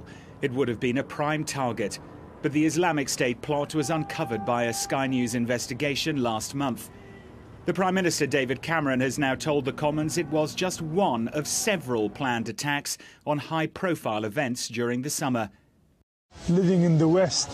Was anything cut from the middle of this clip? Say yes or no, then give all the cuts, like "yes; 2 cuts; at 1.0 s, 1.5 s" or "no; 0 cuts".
yes; 1 cut; at 5.4 s